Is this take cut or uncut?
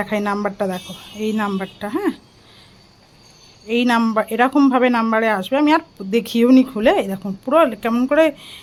uncut